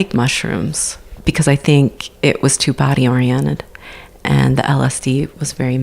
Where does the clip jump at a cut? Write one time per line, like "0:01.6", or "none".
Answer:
0:01.1